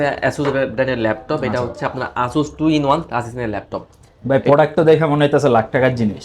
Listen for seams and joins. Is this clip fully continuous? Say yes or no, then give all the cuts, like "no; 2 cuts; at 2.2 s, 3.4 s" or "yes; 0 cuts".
yes; 0 cuts